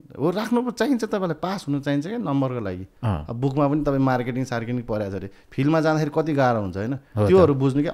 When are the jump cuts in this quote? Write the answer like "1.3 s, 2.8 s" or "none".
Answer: 2.9 s